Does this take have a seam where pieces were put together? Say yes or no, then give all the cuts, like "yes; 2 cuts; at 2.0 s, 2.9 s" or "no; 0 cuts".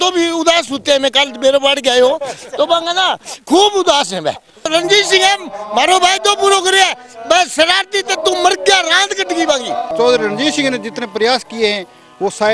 yes; 2 cuts; at 4.7 s, 9.9 s